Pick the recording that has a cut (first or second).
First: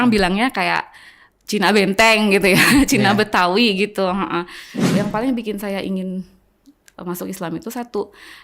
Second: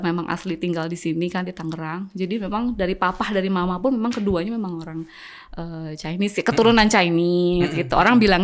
first